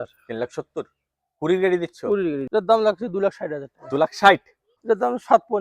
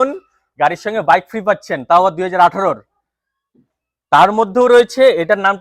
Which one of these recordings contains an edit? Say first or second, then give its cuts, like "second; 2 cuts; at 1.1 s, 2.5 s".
first; 2 cuts; at 2.4 s, 4.7 s